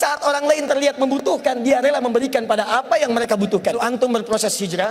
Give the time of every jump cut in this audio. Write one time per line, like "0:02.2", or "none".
0:03.8